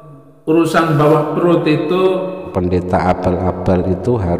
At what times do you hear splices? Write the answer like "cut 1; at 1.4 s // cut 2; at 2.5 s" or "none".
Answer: cut 1; at 2.6 s